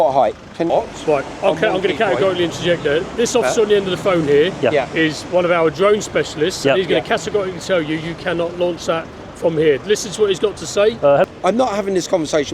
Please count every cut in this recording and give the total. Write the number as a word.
two